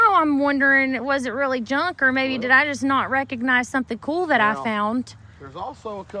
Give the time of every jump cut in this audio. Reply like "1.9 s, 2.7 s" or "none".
none